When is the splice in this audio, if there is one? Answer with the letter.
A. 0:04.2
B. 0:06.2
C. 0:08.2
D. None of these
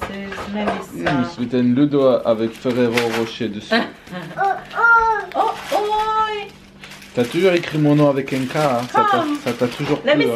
D